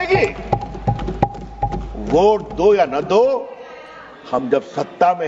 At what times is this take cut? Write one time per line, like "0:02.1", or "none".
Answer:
none